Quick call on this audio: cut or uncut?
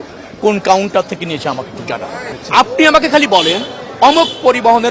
cut